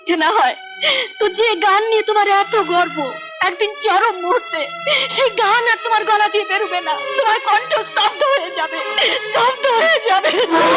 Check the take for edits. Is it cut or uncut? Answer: uncut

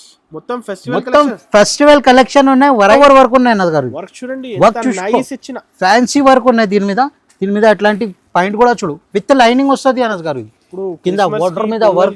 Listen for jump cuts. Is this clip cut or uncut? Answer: cut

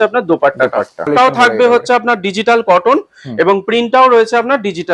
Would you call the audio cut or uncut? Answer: cut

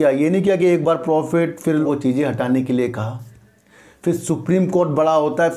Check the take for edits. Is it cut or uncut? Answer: cut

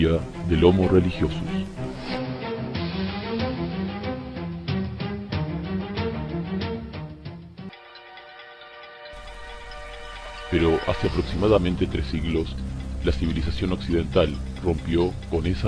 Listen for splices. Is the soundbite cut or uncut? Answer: cut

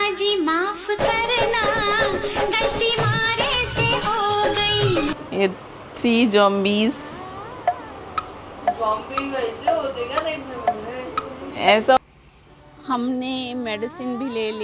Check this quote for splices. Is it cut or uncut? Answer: cut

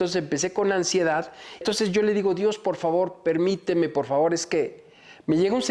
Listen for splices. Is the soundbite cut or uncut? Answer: cut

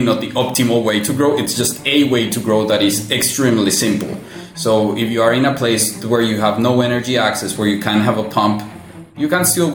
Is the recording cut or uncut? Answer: uncut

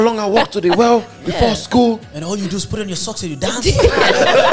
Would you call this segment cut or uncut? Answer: uncut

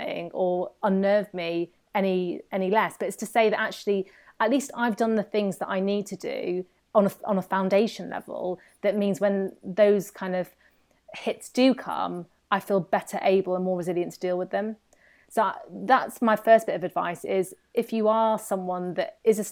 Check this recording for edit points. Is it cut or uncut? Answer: uncut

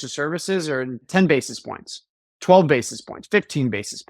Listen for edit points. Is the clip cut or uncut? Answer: cut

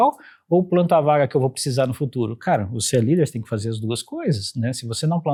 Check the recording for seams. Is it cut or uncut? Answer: uncut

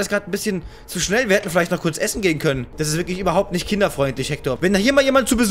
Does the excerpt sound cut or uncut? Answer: cut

